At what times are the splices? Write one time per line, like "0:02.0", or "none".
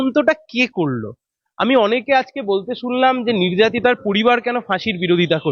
none